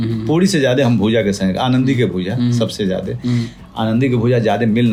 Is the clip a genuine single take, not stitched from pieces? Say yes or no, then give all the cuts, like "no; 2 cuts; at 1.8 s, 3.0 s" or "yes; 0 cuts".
yes; 0 cuts